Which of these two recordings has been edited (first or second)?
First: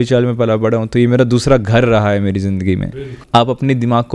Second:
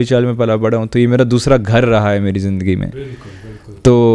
first